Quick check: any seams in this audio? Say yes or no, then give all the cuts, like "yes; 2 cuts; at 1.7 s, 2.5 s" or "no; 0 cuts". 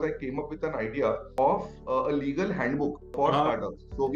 yes; 2 cuts; at 1.3 s, 3.0 s